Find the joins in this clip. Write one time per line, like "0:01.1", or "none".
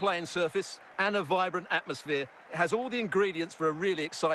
none